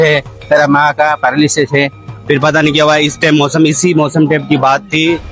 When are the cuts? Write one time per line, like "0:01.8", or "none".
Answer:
0:02.1